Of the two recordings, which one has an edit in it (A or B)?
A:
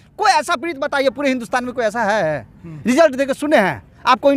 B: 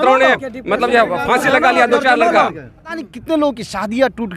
B